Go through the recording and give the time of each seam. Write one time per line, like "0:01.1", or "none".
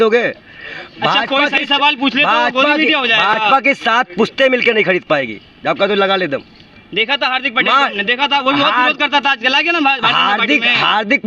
none